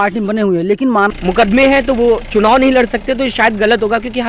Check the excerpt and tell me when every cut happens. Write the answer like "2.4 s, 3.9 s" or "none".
1.1 s